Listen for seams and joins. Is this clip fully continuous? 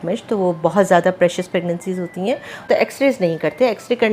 no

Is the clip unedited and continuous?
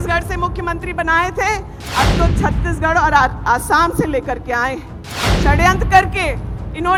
yes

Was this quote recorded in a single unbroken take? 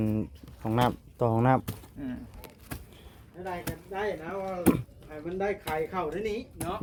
yes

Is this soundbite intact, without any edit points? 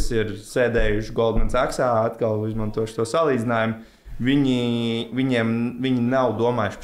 yes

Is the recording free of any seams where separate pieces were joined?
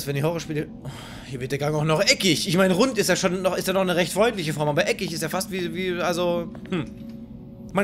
yes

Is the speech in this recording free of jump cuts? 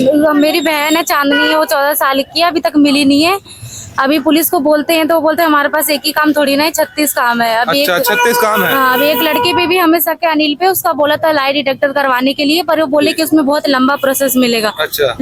yes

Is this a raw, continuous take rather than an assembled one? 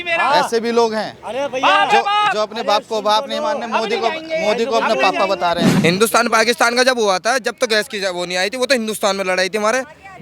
no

